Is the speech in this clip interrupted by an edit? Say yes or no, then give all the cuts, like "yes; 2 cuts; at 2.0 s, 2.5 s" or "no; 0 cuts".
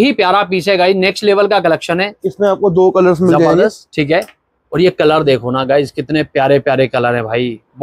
no; 0 cuts